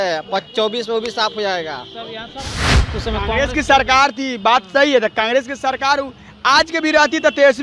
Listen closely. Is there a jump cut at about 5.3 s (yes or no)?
no